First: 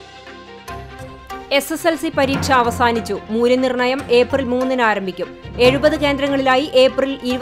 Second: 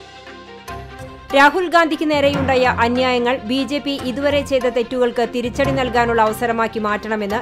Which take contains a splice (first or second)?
second